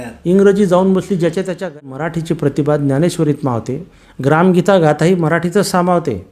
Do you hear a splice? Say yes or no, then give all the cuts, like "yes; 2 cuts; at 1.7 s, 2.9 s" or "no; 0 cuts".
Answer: yes; 1 cut; at 1.6 s